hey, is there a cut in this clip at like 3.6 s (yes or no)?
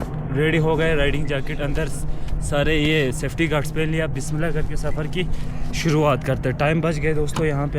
no